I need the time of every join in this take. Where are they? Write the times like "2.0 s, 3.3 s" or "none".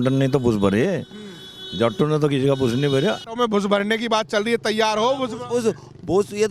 3.2 s